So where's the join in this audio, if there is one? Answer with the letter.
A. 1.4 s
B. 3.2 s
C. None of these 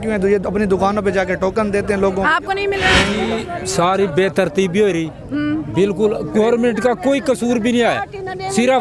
B